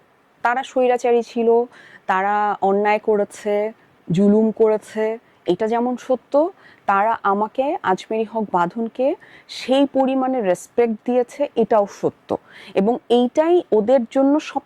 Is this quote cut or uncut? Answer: uncut